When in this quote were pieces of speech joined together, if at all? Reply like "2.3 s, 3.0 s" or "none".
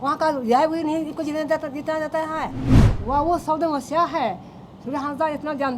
2.7 s